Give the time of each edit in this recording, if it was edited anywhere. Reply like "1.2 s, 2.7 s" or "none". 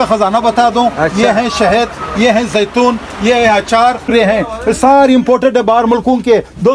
4.0 s